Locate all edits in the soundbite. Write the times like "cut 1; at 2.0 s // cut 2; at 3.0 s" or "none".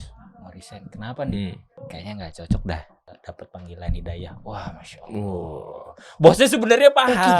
cut 1; at 1.7 s // cut 2; at 3.1 s